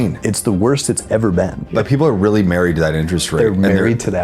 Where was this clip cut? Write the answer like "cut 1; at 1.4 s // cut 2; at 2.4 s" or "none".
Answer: cut 1; at 1.7 s